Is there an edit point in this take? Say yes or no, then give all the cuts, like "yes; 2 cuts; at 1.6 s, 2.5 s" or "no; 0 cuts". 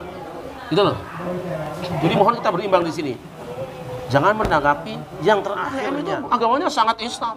yes; 1 cut; at 6.0 s